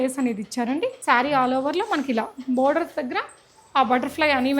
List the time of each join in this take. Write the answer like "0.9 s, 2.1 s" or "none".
1.0 s